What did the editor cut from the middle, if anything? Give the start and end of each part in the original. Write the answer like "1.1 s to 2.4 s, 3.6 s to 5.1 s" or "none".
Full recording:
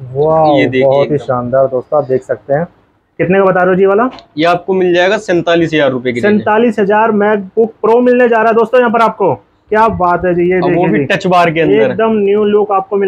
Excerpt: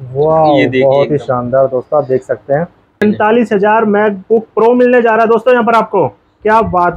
3.0 s to 6.3 s